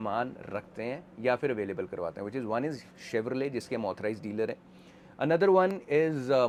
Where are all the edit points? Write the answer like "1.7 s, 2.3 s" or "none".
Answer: none